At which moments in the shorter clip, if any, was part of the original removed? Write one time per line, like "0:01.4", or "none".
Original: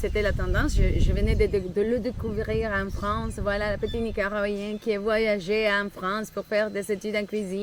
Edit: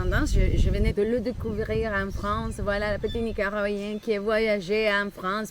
0:00.9